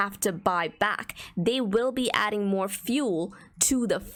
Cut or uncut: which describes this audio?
uncut